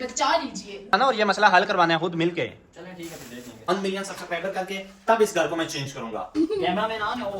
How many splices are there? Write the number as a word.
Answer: three